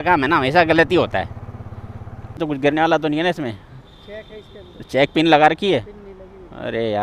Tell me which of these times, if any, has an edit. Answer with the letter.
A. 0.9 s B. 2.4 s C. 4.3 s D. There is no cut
B